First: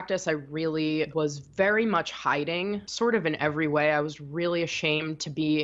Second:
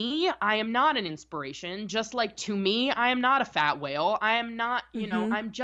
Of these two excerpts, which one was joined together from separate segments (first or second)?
first